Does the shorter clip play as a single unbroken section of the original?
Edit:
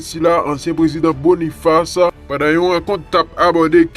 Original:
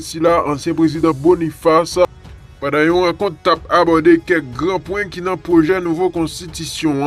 no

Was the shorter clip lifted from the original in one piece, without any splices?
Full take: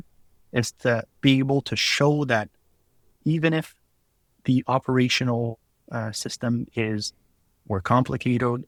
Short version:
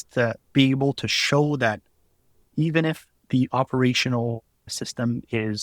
no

